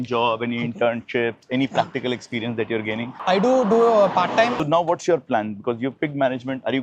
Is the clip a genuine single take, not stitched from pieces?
no; 1 cut; at 4.6 s

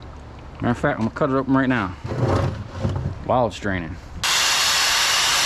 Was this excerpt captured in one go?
no; 1 cut; at 4.2 s

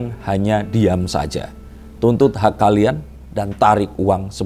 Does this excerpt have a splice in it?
no; 0 cuts

